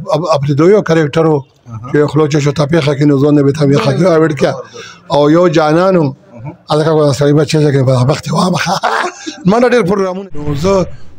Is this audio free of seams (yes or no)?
no